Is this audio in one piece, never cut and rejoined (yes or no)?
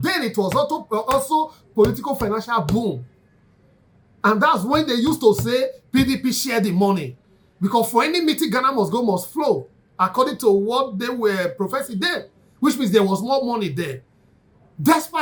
yes